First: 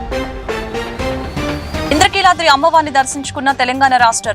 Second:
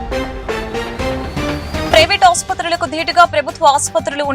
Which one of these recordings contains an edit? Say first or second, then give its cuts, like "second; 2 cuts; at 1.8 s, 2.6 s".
second; 1 cut; at 1.9 s